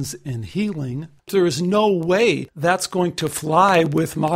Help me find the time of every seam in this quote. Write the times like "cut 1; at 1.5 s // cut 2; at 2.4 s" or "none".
cut 1; at 1.3 s // cut 2; at 2.5 s